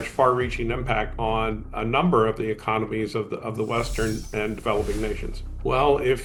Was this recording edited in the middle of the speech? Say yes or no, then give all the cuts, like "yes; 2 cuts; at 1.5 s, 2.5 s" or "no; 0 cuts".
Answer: no; 0 cuts